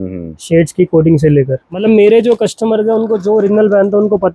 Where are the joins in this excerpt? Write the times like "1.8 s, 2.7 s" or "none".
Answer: 1.8 s